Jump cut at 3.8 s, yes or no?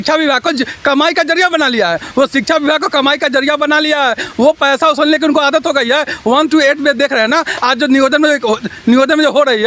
no